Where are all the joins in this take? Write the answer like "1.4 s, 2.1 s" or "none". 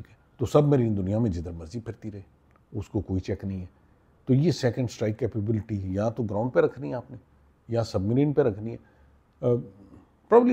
none